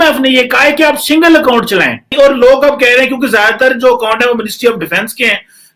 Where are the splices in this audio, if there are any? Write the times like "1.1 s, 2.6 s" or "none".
2.1 s